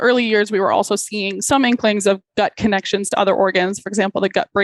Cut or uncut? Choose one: cut